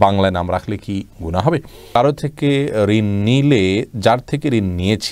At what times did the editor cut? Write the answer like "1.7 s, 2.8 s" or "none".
2.0 s